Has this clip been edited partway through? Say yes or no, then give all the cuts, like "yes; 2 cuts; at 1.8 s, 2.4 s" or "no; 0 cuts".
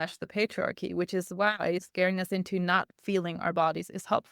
yes; 1 cut; at 1.9 s